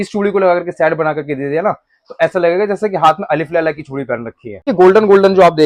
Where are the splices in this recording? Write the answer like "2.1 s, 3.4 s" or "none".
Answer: 4.7 s